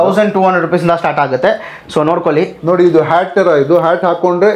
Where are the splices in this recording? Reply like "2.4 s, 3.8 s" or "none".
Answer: 2.6 s